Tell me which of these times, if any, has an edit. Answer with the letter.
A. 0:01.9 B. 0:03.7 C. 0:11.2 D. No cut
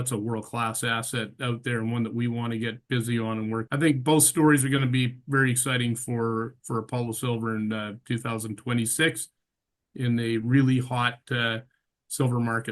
B